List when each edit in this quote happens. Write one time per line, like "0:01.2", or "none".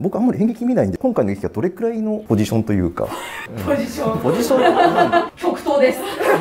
0:05.3